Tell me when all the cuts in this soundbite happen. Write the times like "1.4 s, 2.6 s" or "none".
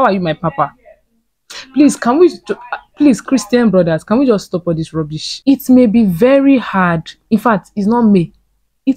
5.2 s